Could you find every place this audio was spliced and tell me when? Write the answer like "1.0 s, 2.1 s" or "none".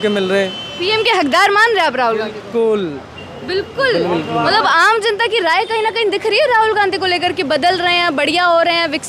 none